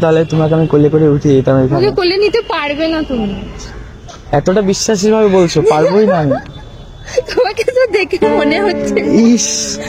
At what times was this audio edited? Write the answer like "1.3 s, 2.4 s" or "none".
none